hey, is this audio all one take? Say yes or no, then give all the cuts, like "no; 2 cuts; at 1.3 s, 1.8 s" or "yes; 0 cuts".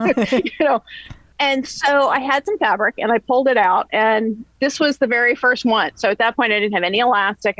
no; 1 cut; at 1.2 s